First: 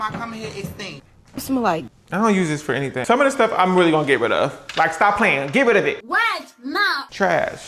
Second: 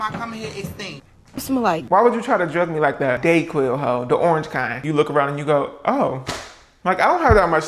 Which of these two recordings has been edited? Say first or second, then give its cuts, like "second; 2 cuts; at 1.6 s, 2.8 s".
second; 2 cuts; at 1.8 s, 4.7 s